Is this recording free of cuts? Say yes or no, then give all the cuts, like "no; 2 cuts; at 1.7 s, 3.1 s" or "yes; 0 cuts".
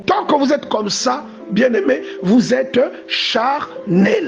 no; 1 cut; at 2.1 s